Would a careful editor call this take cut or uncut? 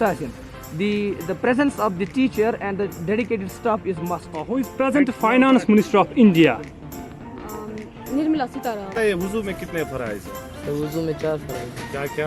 cut